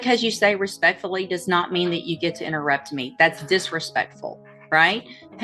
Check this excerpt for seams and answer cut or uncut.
uncut